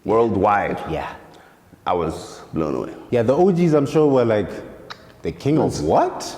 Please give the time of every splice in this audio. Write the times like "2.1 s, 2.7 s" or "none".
2.9 s